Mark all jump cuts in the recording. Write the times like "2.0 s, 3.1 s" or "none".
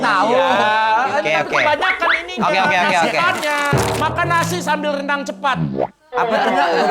3.8 s